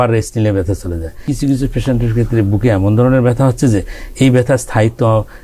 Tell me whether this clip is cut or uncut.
cut